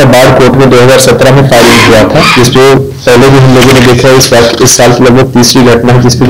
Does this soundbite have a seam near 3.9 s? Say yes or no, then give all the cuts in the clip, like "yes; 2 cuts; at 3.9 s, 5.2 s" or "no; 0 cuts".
no; 1 cut; at 2.5 s